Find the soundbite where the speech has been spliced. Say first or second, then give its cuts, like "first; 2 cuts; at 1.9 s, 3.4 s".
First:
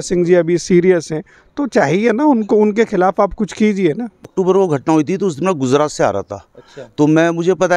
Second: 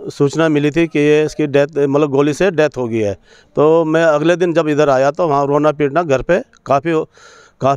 first; 1 cut; at 4.3 s